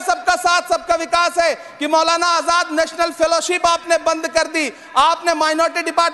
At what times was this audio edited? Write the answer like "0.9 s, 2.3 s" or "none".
none